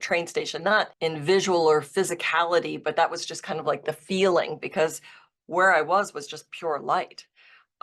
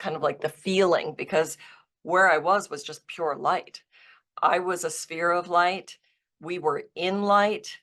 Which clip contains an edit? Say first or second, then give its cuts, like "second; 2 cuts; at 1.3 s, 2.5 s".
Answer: first; 1 cut; at 0.9 s